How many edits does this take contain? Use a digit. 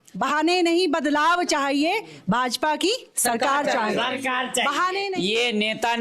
1